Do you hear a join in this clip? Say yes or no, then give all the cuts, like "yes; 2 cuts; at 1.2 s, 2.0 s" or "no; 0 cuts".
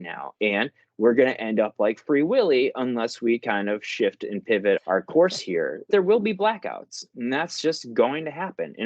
yes; 2 cuts; at 4.8 s, 5.9 s